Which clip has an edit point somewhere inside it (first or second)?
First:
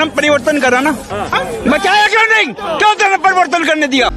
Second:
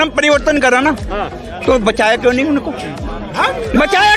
first